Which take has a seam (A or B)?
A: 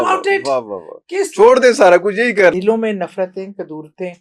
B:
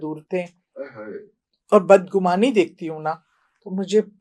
A